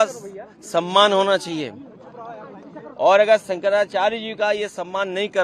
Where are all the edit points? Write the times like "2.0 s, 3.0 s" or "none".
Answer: none